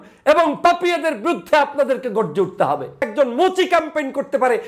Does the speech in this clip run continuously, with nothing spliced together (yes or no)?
no